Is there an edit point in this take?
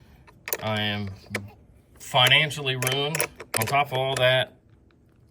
yes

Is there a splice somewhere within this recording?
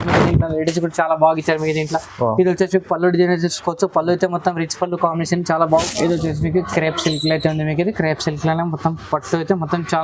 yes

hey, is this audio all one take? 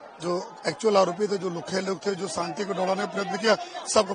yes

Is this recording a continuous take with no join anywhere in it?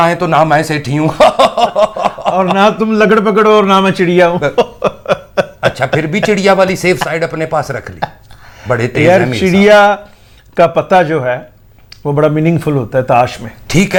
yes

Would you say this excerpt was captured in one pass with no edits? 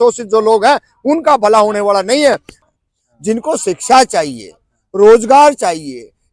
no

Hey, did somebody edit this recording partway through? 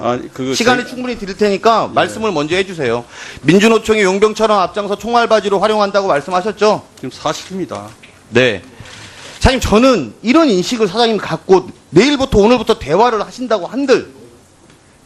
no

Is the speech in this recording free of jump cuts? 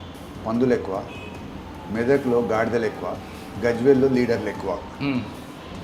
yes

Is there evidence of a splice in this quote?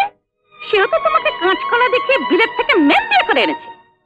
no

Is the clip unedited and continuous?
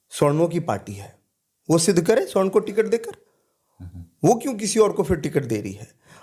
yes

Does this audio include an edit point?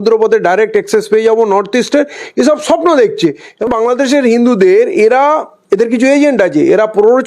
yes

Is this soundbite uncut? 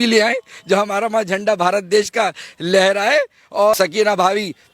no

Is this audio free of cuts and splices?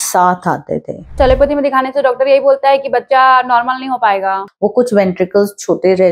no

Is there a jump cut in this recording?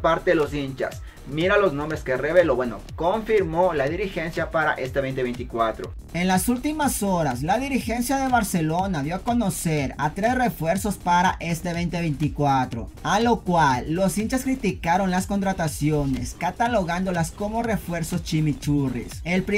no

